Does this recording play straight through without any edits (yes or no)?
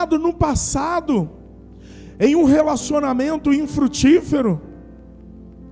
yes